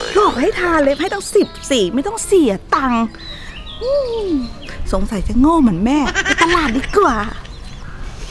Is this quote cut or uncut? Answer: uncut